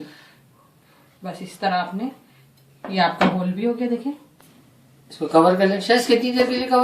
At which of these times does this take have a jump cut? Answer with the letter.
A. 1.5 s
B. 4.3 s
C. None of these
B